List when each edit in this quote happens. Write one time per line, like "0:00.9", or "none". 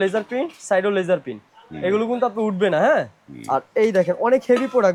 none